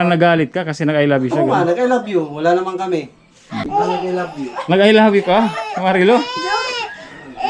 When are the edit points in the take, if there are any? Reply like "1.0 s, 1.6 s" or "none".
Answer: 3.6 s